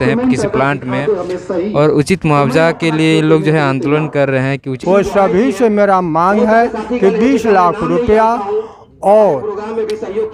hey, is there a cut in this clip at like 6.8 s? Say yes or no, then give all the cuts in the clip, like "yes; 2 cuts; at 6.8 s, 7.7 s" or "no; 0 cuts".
no; 1 cut; at 4.7 s